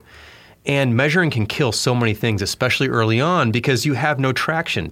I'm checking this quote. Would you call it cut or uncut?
uncut